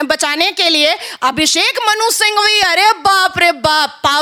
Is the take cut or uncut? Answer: uncut